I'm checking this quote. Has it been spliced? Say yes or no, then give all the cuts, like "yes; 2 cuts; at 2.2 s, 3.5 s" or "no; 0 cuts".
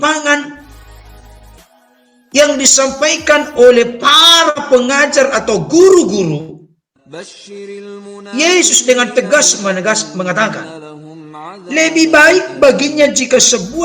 no; 0 cuts